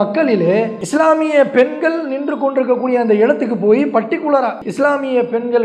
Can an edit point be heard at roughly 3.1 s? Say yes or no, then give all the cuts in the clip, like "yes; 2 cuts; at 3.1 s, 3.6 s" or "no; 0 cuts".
no; 1 cut; at 4.6 s